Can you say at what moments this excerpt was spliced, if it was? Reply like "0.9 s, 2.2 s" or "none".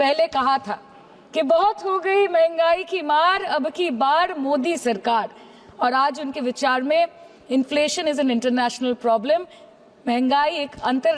none